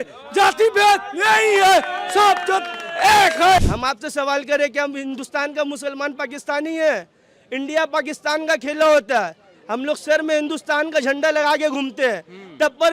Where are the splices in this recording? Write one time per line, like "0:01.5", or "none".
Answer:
0:03.6